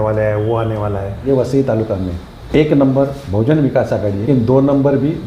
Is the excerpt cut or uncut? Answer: cut